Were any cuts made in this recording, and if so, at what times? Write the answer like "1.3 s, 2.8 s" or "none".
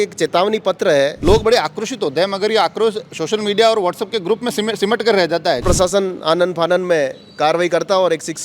1.2 s, 5.6 s